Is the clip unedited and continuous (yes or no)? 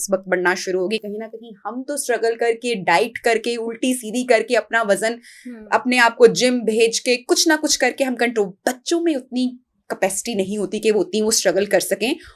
yes